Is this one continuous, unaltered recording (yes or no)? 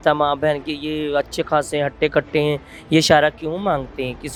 yes